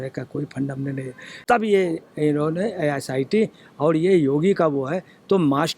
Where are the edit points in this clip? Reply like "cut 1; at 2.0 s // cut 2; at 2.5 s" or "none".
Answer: cut 1; at 1.3 s